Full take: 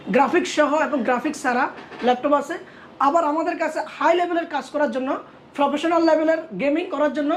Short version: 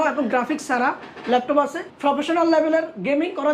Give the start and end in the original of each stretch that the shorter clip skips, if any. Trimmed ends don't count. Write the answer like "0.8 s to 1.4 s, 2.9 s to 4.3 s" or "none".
2.6 s to 5.4 s